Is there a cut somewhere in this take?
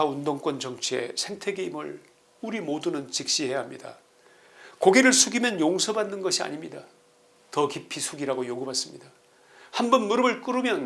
no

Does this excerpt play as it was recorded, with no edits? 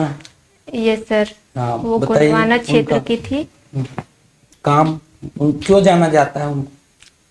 yes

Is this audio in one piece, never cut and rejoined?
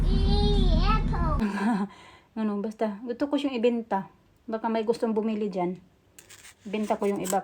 no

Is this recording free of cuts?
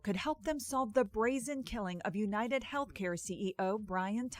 yes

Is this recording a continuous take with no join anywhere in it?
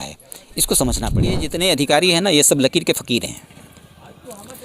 no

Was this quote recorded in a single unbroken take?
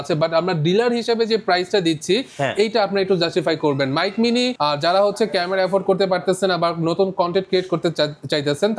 no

